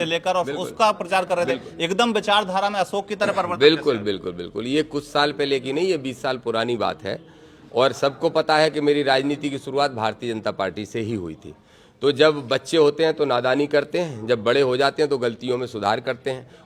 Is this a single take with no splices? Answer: yes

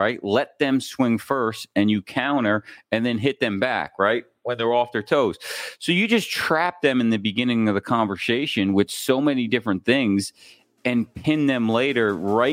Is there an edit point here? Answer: no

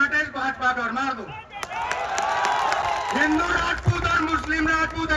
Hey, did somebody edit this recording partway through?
yes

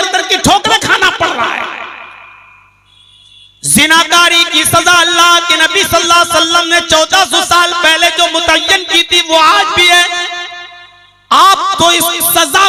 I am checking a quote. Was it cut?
no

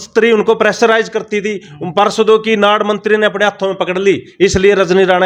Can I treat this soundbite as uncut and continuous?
yes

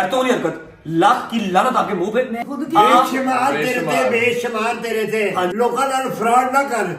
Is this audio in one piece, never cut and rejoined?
no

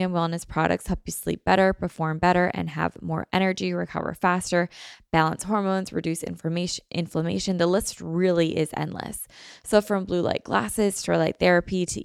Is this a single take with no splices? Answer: yes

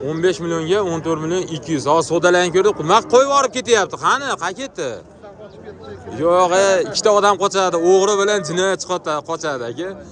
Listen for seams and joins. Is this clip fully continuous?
yes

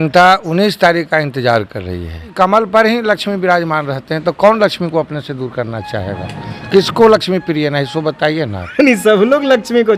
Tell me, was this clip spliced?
yes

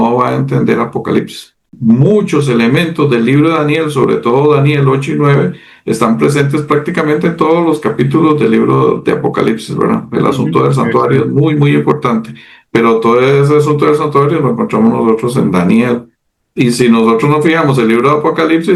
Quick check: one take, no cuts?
no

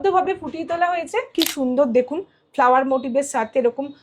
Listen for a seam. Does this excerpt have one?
yes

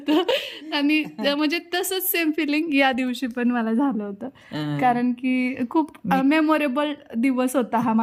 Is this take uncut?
yes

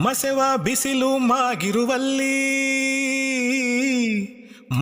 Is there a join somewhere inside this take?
no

